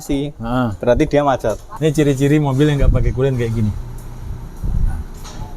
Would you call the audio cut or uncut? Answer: cut